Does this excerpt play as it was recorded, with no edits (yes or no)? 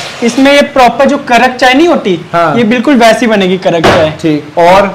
yes